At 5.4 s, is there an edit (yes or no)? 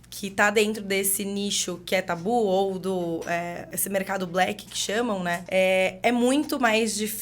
yes